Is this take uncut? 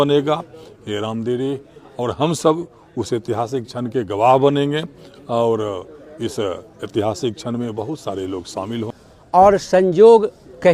no; 1 cut; at 9.1 s

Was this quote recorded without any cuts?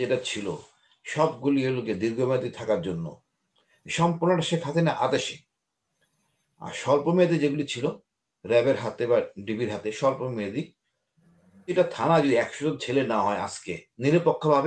no; 1 cut; at 11.7 s

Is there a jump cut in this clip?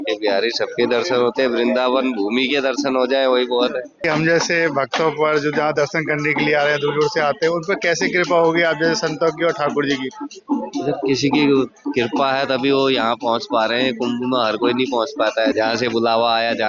yes; 2 cuts; at 4.0 s, 15.5 s

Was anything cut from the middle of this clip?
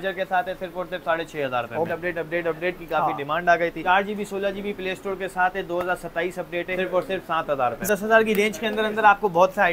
yes; 4 cuts; at 1.9 s, 3.8 s, 6.7 s, 7.9 s

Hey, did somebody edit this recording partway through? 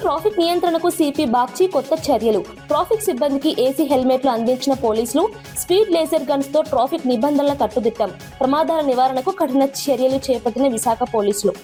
no; 0 cuts

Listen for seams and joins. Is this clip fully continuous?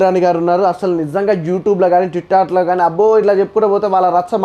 yes; 0 cuts

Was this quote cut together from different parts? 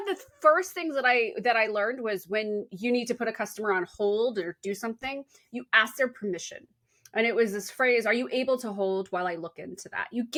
no; 0 cuts

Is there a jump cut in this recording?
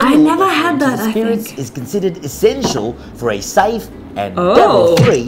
no; 0 cuts

